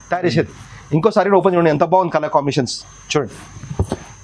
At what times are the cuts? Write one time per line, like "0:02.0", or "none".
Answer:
none